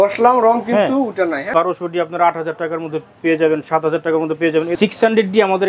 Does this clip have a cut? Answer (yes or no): yes